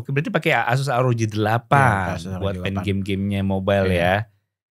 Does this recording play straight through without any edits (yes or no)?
yes